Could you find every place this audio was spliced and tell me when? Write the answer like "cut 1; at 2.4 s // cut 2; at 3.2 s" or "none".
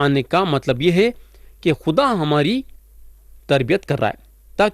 none